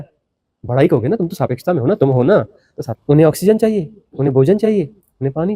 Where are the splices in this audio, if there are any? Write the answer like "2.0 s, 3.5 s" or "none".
3.0 s

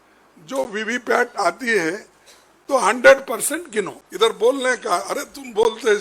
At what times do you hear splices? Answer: 4.0 s

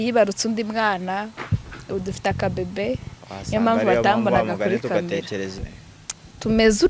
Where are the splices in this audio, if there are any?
5.6 s

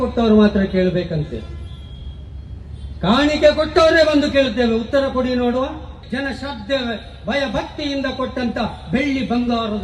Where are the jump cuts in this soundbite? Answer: 6.0 s

